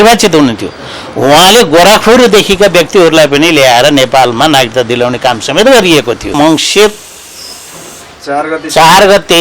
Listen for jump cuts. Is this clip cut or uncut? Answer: cut